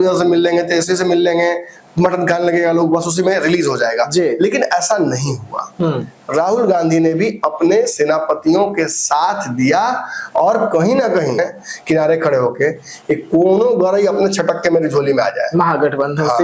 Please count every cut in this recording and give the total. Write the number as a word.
one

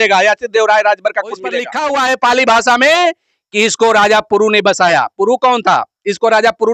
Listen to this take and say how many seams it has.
one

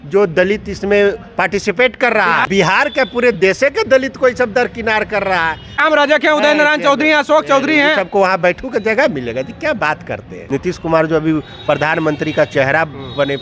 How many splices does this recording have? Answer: three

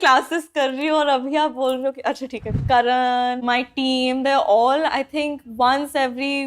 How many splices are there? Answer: two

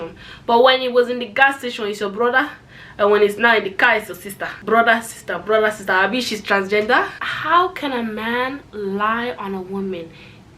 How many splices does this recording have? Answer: one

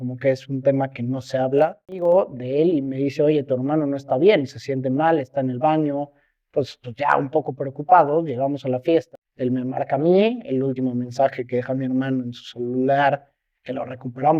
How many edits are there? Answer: two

